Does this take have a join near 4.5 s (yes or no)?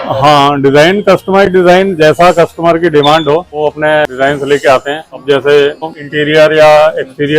no